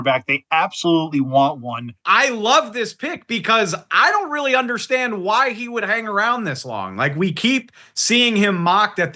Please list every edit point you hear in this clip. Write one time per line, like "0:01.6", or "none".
0:01.9